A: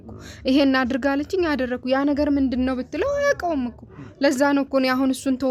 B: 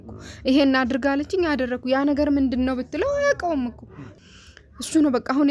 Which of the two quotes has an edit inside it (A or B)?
B